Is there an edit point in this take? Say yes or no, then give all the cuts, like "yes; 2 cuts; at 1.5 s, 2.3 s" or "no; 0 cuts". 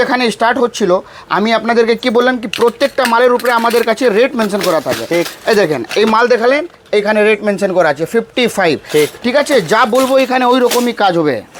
no; 0 cuts